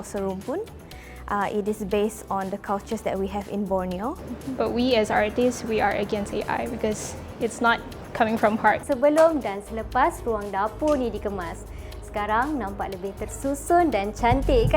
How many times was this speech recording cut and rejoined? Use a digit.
2